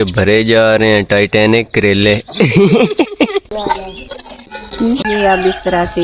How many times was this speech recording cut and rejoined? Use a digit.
2